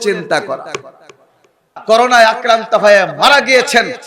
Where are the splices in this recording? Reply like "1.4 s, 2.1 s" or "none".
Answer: 1.7 s